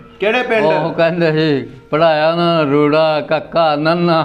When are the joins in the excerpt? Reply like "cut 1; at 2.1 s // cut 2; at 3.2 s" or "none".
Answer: none